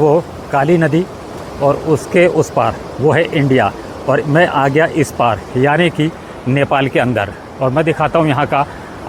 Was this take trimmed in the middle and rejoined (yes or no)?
no